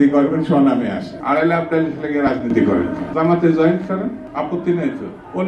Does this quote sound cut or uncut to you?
uncut